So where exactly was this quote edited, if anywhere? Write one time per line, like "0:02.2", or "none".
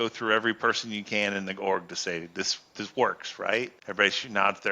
0:03.8